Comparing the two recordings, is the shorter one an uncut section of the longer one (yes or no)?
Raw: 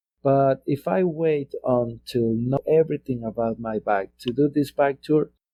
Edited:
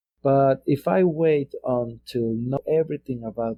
yes